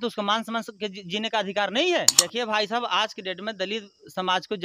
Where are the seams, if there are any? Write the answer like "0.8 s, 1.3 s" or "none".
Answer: 2.2 s